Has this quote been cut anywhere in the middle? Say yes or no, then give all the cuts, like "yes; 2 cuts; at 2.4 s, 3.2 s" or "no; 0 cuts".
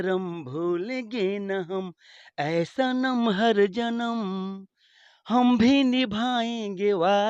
no; 0 cuts